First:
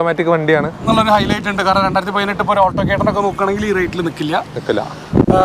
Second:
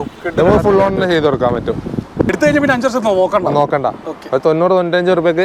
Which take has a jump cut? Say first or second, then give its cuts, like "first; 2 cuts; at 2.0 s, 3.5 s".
second; 1 cut; at 2.3 s